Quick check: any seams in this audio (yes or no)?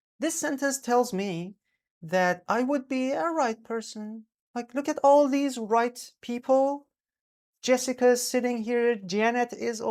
no